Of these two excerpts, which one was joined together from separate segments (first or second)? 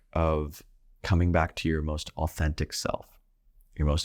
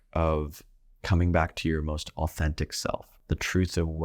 second